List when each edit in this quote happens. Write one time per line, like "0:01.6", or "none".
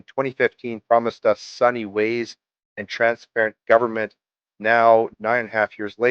0:05.2